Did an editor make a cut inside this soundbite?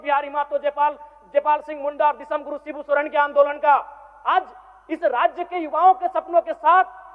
no; 0 cuts

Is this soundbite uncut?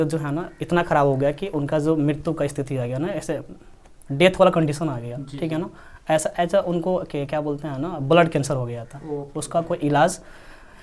yes; 0 cuts

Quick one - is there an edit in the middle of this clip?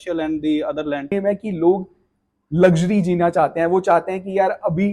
yes; 1 cut; at 1.1 s

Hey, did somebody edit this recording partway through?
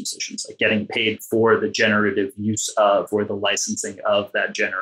no; 0 cuts

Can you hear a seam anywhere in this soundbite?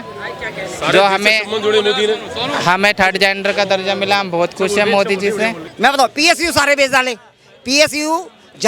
yes; 1 cut; at 5.6 s

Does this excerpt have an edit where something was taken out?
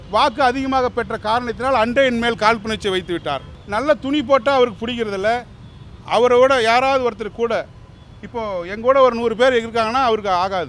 yes; 1 cut; at 3.5 s

